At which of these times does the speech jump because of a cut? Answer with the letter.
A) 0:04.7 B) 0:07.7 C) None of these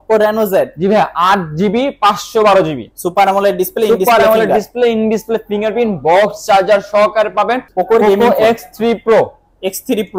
B